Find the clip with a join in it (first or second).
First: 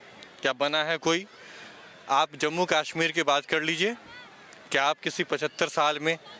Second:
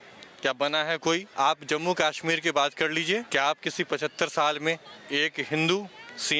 second